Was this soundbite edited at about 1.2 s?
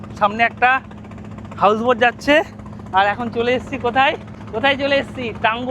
no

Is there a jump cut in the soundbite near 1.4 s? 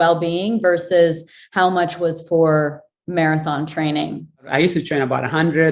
no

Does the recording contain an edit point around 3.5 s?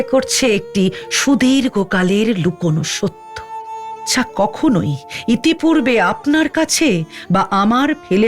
yes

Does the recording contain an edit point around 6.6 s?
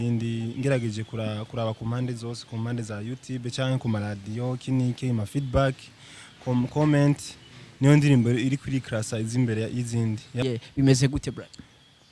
no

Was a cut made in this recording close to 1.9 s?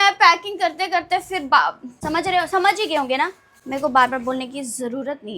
yes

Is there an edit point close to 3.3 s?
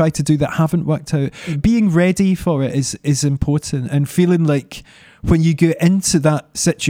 no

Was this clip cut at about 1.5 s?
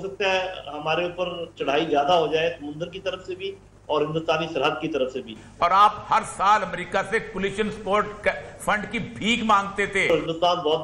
no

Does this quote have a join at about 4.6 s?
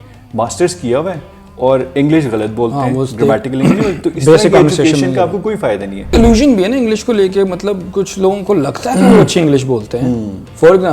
no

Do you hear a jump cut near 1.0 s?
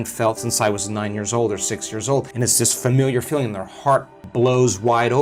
no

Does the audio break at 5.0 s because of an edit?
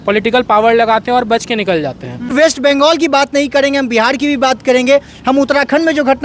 no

